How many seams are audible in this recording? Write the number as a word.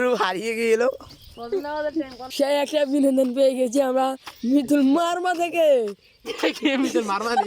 one